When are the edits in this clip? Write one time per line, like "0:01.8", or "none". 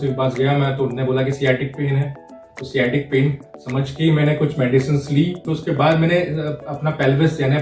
0:05.4